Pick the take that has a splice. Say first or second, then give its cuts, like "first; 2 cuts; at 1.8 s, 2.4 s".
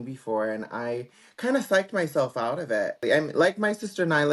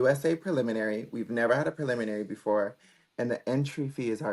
first; 1 cut; at 3.0 s